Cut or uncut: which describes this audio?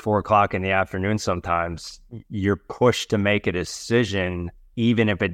uncut